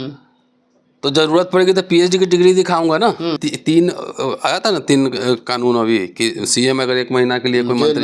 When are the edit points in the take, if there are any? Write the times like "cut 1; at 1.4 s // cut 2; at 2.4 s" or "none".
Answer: cut 1; at 3.4 s